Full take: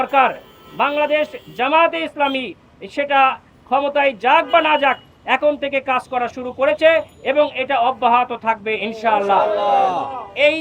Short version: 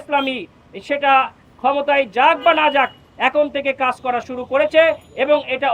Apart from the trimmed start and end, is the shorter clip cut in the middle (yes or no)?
no